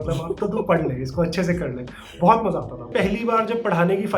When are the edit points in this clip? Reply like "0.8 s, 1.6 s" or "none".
2.9 s